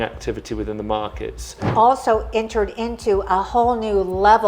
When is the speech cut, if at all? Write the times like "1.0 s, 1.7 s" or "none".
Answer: 1.7 s